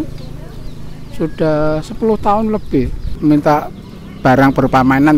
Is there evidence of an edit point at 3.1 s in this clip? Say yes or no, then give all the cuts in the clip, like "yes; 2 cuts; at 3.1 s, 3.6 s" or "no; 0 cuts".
yes; 1 cut; at 3.1 s